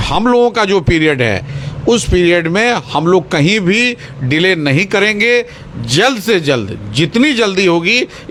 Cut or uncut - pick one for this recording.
uncut